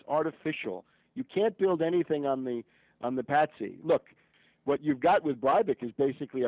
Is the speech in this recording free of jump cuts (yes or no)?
no